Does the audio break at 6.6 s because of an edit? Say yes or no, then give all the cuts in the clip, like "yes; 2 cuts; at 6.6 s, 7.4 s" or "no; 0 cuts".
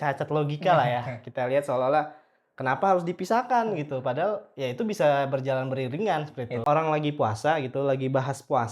yes; 1 cut; at 6.6 s